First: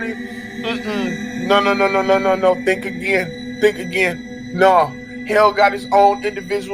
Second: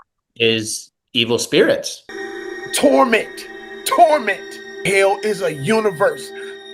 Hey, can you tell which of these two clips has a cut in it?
second; 1 cut; at 2.2 s

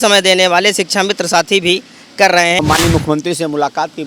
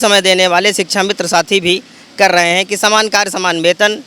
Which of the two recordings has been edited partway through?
first; 1 cut; at 2.6 s

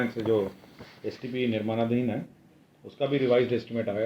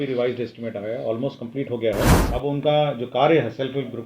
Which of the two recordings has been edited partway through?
second; 1 cut; at 2.2 s

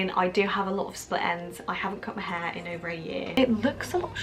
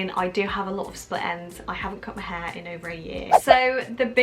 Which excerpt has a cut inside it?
first; 1 cut; at 3.3 s

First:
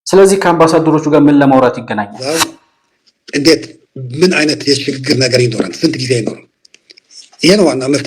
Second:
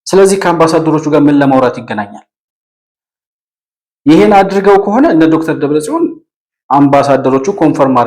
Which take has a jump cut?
first; 1 cut; at 2.3 s

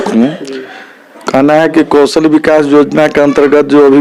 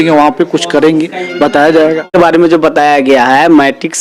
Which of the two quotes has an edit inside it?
second; 1 cut; at 2.1 s

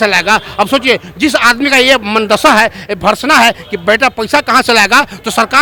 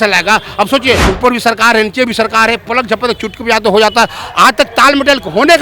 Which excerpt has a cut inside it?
second; 1 cut; at 1.1 s

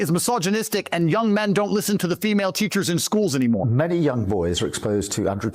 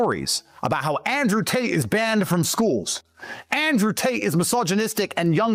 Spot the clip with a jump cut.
first; 1 cut; at 3.7 s

